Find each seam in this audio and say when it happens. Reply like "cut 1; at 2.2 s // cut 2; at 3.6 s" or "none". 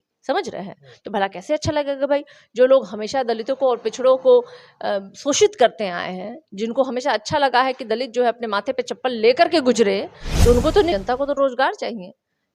cut 1; at 10.9 s